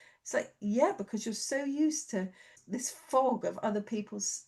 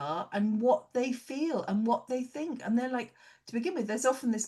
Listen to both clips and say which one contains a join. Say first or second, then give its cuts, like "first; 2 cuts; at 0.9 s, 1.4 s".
first; 1 cut; at 2.6 s